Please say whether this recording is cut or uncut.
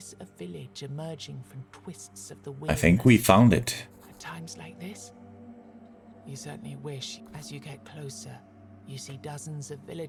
uncut